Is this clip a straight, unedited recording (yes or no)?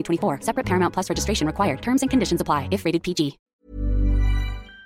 no